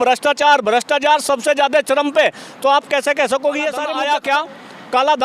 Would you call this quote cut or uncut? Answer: cut